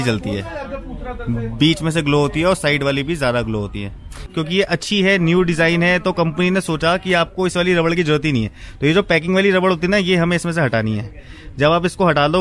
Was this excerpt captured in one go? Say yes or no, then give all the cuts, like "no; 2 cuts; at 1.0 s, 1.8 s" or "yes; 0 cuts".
no; 1 cut; at 4.2 s